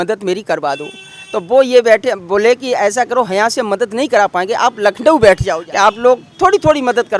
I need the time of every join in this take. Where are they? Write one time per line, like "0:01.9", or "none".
0:05.6

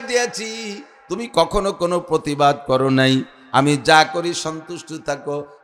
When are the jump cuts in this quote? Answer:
none

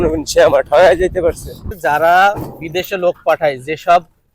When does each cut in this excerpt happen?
0:01.7

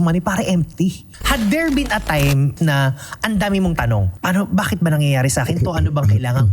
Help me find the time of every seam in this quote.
0:01.1
0:02.5
0:04.1

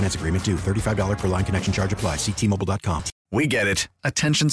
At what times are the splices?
0:03.1

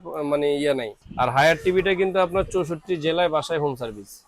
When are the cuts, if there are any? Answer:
0:01.0

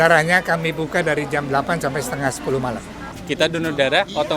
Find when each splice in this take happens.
0:03.2

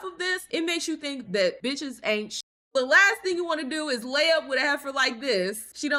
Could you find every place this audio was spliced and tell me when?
none

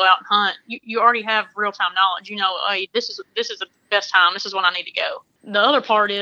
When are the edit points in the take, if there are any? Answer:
0:05.3

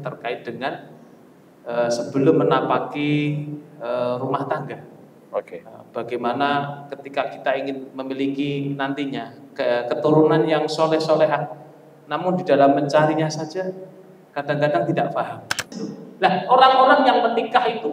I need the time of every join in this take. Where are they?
0:15.8

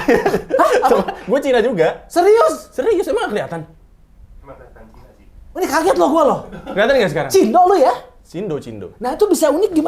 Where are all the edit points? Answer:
none

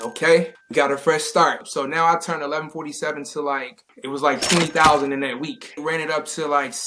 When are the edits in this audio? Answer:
0:01.7
0:05.8

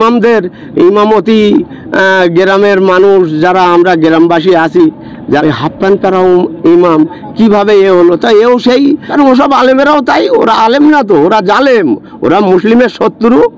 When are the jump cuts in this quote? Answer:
0:05.4
0:09.1

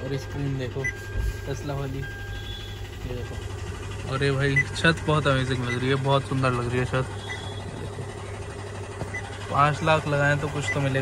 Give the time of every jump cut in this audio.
none

